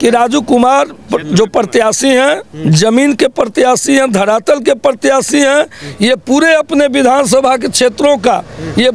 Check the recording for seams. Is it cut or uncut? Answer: uncut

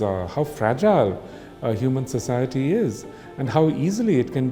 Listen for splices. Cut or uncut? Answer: uncut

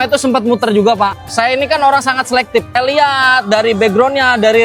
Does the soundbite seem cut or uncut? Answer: cut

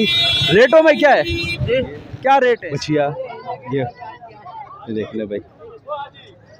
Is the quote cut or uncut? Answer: cut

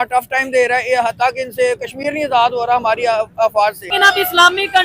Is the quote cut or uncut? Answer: cut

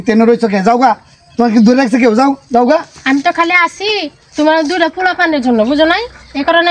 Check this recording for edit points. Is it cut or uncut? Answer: uncut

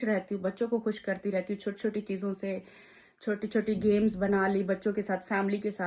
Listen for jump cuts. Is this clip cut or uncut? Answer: uncut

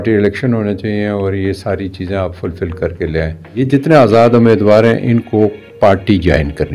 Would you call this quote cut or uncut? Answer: cut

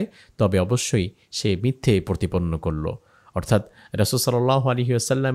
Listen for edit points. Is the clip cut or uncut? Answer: uncut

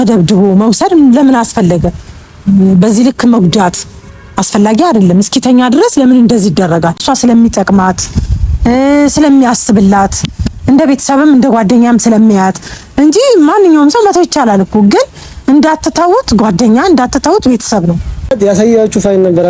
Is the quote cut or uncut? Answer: cut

